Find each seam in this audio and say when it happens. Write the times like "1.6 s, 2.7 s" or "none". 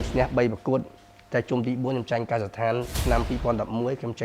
2.9 s